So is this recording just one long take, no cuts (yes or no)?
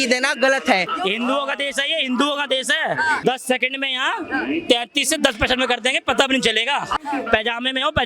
no